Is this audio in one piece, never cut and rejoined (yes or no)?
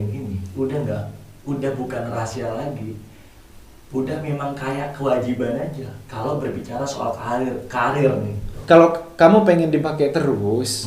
no